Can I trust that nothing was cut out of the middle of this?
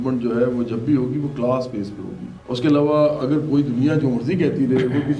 yes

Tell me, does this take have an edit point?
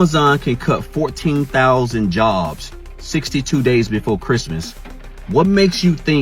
no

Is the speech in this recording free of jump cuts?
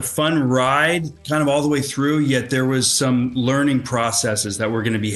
yes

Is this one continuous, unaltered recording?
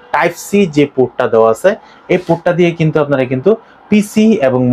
yes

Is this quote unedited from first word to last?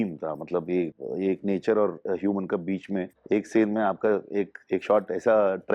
no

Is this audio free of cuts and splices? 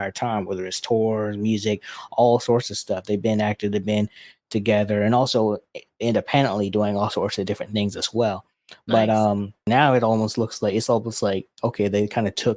no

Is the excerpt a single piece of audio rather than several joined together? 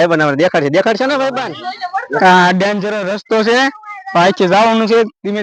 no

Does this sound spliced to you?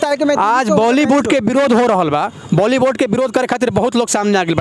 no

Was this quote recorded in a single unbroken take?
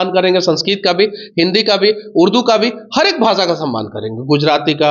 yes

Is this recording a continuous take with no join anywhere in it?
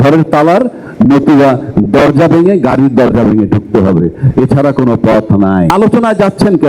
no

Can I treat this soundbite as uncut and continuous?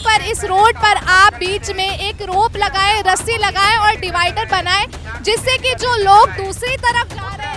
yes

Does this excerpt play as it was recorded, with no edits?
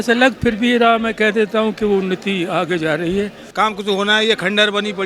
no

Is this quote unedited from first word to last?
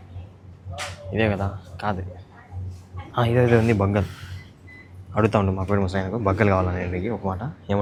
yes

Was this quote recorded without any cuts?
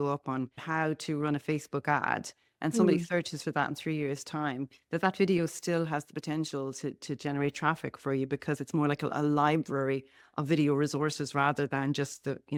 yes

